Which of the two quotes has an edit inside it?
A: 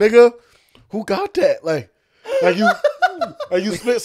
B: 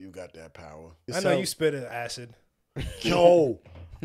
B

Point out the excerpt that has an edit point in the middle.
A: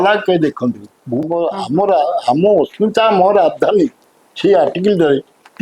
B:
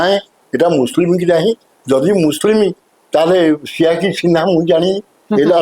A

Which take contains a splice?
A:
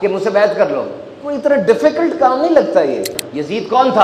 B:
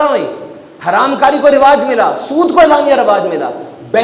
A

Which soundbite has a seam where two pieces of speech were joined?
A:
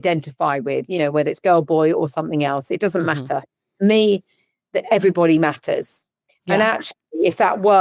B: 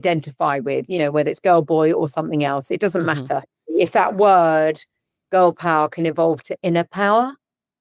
B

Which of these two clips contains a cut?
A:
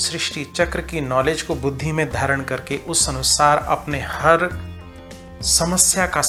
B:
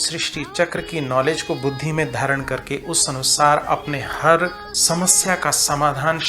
B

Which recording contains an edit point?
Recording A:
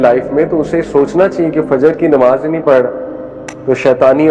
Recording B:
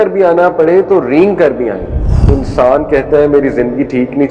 B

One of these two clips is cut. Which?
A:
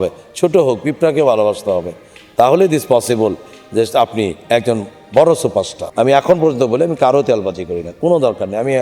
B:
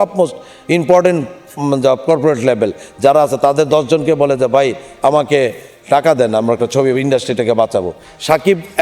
A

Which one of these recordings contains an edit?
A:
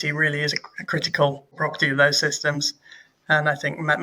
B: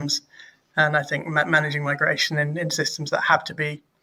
A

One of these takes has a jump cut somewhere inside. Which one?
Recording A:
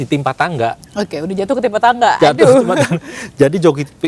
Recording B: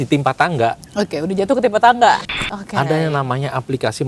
B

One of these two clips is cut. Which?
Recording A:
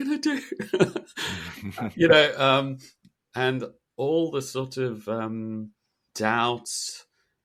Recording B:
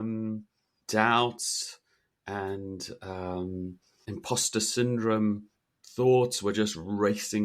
B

